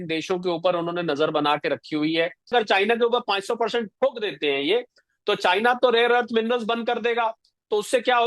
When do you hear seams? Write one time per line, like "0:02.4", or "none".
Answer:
0:02.5